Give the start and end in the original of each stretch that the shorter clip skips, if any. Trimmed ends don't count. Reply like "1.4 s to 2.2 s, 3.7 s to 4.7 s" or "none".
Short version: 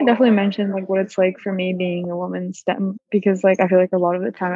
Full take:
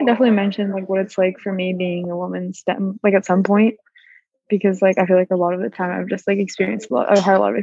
2.9 s to 4.3 s